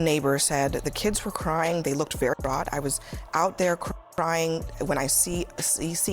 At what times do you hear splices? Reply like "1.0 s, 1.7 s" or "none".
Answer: 1.1 s